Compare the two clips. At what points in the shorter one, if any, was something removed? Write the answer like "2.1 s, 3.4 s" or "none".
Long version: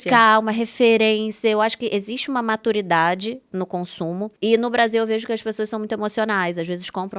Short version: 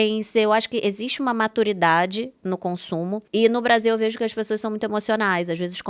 none